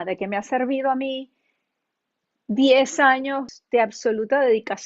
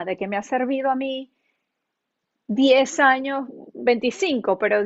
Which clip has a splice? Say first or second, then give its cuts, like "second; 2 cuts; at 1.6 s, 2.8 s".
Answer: first; 1 cut; at 3.5 s